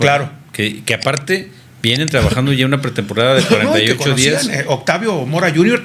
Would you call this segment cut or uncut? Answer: uncut